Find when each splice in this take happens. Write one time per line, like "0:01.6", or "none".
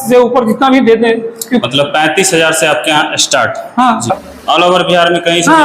0:04.1